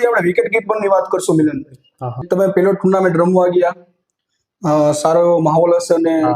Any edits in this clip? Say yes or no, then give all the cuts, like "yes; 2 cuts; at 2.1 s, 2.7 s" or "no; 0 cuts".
yes; 1 cut; at 2.2 s